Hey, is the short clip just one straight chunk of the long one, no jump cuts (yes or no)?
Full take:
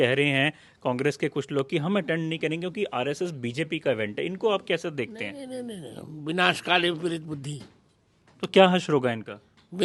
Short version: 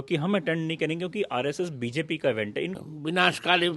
no